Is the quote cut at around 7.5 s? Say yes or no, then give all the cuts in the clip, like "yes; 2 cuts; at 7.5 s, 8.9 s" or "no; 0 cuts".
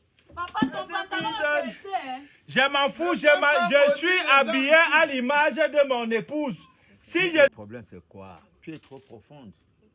yes; 1 cut; at 7.5 s